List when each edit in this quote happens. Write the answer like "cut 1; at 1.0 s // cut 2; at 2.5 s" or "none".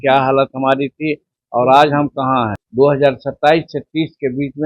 cut 1; at 2.6 s